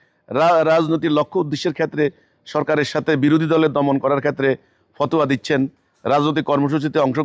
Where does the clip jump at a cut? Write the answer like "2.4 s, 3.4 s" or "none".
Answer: none

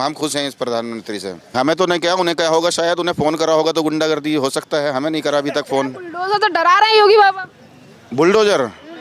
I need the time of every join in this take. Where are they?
1.5 s

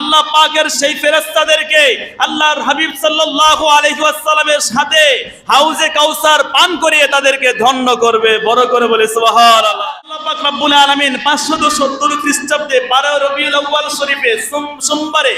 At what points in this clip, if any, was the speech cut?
9.9 s

